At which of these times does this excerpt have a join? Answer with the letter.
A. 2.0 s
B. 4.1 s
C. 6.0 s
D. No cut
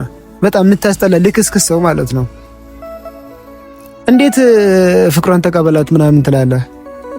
D